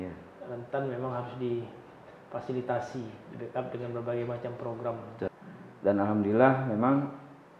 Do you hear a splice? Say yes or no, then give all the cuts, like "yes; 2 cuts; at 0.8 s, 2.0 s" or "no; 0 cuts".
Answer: yes; 1 cut; at 5.3 s